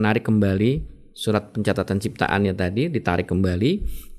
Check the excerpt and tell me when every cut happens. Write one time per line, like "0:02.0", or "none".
none

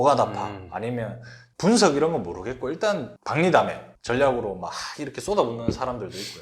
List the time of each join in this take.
0:01.5
0:03.2

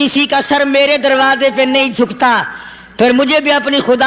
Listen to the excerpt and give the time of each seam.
none

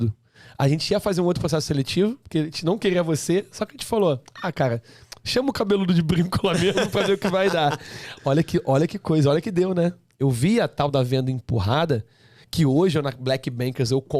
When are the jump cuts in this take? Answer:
0:10.1

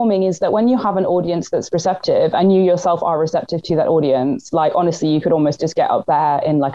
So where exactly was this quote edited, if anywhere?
none

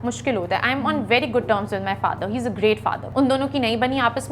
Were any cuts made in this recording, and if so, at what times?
0:03.0

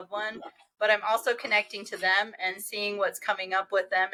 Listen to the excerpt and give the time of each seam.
none

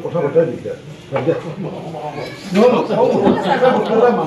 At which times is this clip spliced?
none

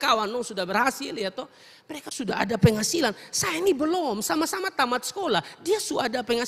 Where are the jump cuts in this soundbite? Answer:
none

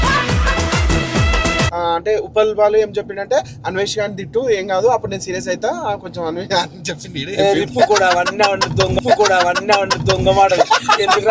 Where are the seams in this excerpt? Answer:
0:01.7

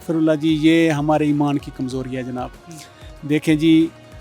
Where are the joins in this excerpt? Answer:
none

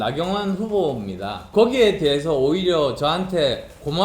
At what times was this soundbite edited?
0:01.5

